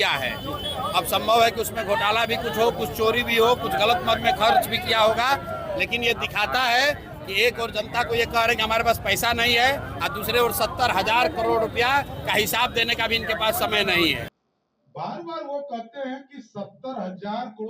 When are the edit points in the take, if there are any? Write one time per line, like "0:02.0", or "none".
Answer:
0:14.3